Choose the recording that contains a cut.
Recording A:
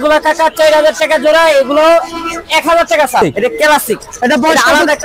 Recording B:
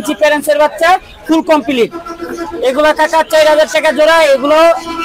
A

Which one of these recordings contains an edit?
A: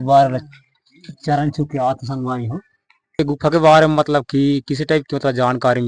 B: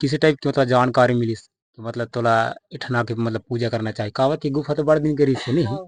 A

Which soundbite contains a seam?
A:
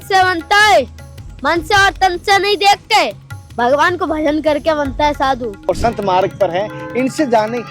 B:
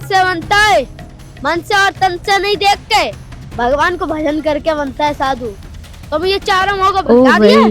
A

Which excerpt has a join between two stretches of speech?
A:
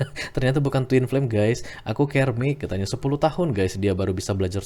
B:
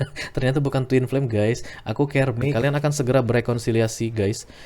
B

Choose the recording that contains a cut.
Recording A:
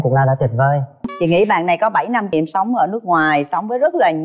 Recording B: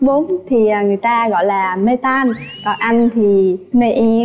A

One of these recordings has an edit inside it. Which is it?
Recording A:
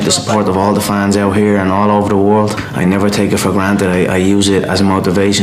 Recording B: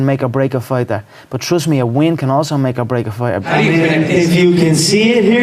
B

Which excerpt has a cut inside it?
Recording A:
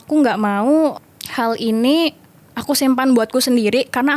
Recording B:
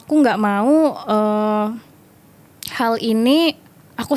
A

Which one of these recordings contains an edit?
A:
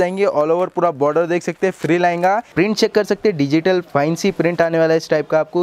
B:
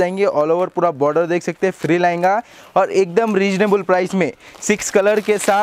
A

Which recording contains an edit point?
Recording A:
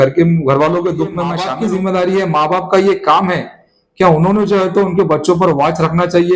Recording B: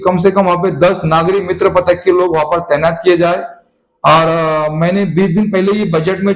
A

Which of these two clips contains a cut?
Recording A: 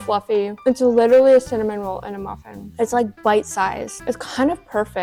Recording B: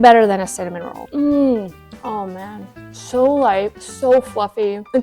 B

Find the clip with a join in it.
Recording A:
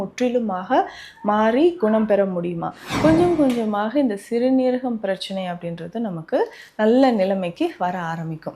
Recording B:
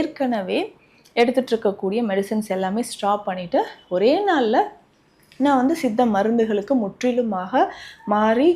A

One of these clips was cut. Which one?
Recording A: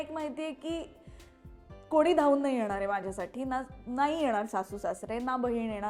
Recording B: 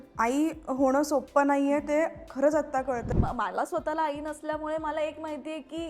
B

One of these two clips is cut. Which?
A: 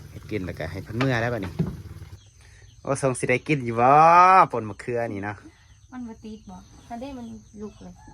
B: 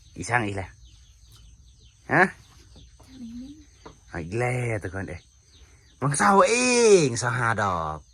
A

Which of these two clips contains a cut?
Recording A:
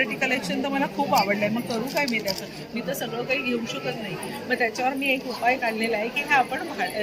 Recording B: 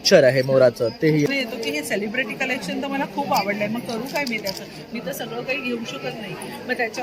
B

